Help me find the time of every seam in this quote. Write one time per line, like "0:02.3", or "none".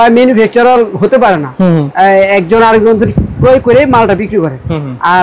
none

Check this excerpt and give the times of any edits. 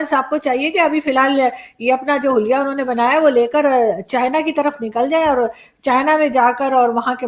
none

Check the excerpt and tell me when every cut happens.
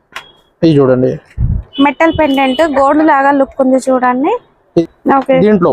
0:04.8

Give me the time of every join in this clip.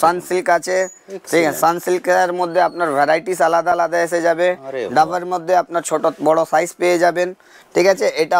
none

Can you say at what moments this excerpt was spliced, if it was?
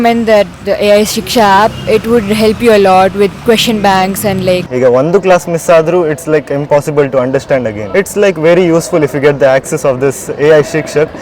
0:04.7

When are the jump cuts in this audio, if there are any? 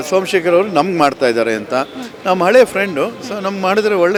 none

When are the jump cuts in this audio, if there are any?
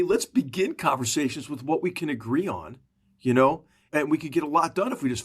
0:03.9

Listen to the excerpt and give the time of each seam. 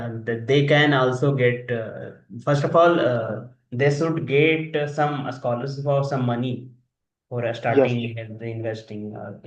none

